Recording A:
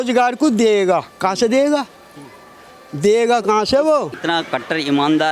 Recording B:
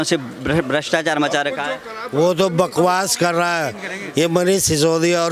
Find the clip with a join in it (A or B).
A